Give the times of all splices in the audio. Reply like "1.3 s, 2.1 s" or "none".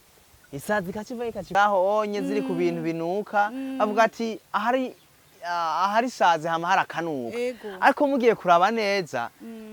1.5 s